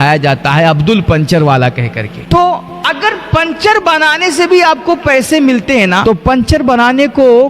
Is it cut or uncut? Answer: cut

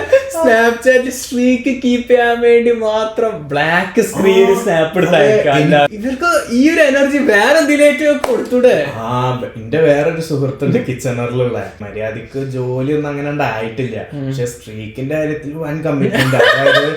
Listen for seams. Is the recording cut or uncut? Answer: cut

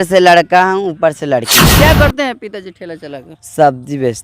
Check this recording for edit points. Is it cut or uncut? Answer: cut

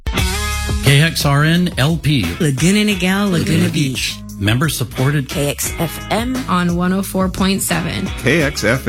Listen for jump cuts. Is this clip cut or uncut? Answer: uncut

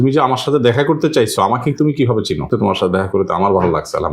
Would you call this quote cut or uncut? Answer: cut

